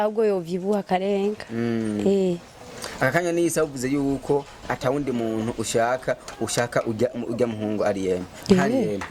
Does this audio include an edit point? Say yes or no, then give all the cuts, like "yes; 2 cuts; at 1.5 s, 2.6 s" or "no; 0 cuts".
no; 0 cuts